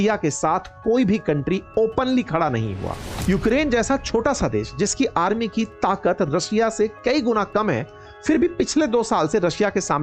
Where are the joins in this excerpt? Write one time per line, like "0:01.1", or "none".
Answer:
0:03.1